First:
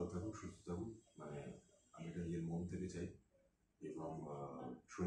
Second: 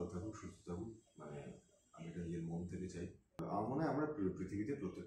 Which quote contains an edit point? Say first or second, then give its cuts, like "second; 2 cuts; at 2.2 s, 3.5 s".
second; 1 cut; at 3.4 s